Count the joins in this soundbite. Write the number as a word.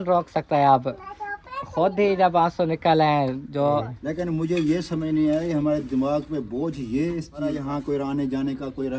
two